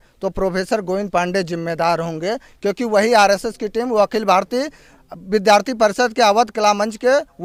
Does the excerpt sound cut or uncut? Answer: uncut